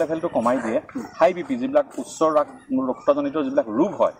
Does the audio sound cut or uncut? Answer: uncut